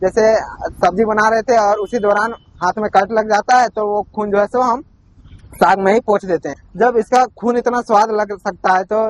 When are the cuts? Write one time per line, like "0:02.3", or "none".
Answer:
0:06.6